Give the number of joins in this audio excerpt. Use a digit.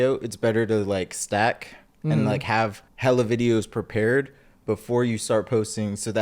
1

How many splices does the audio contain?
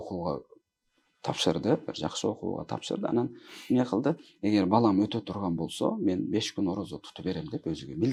0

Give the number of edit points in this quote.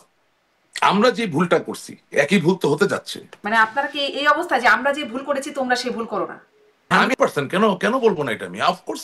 2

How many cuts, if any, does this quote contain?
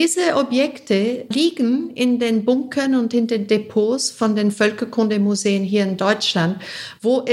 1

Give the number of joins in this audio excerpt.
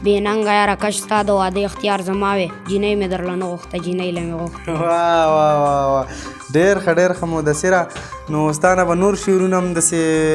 0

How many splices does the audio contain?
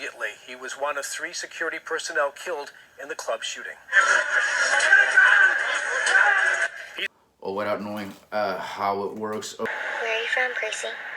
1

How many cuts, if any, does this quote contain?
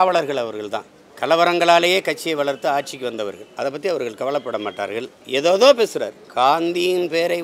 0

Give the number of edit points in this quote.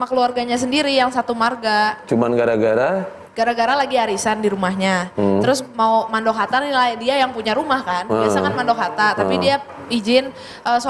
0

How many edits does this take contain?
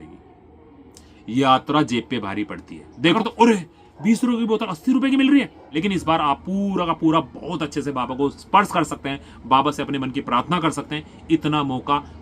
2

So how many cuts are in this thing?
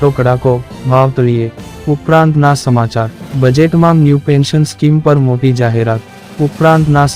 2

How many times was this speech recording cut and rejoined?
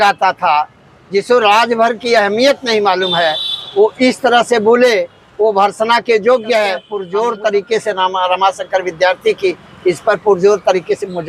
1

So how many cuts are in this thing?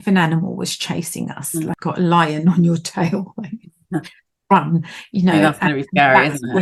1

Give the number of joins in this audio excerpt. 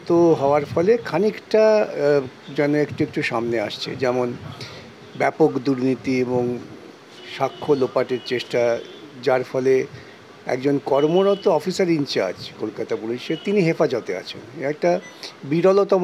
0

